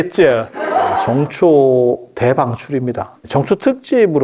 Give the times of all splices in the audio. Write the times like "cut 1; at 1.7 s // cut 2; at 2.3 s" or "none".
cut 1; at 1.0 s // cut 2; at 3.2 s